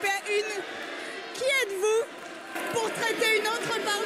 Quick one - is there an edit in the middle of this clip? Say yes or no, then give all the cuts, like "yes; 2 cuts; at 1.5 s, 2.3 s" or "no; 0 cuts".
no; 0 cuts